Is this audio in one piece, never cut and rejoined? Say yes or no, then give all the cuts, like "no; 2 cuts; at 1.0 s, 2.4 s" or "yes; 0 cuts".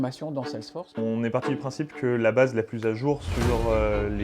no; 1 cut; at 0.9 s